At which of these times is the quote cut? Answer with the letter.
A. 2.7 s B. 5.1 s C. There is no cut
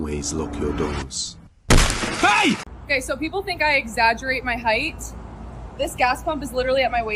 A